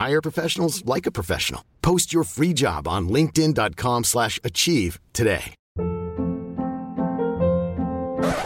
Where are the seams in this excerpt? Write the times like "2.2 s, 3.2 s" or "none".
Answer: none